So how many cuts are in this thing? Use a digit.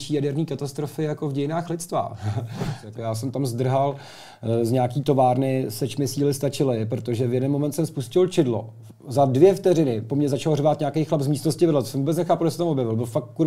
1